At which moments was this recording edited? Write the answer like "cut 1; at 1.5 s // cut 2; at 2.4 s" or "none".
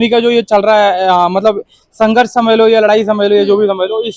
none